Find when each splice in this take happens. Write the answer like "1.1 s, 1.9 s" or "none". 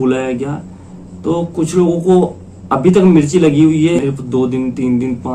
4.0 s